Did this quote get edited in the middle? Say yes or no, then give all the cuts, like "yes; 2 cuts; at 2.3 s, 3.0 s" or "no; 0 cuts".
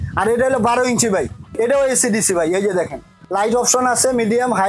yes; 2 cuts; at 1.5 s, 3.1 s